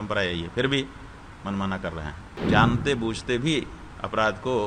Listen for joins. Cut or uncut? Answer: cut